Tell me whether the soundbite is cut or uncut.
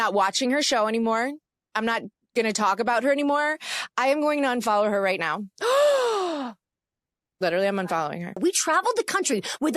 cut